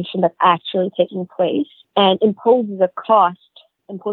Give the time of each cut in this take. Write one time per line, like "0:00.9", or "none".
none